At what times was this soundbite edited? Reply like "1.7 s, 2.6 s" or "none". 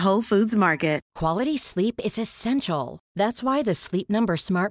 1.1 s